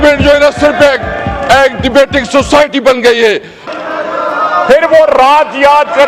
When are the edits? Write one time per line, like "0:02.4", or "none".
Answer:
0:03.6